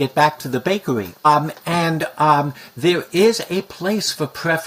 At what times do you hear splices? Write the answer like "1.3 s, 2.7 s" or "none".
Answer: 1.2 s